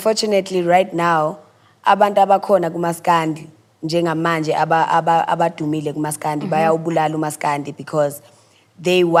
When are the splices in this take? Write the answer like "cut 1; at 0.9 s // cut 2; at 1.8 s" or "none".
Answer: none